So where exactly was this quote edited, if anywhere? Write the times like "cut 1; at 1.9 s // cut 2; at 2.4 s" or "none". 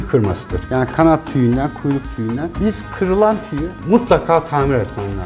none

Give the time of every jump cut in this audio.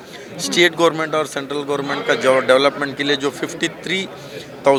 none

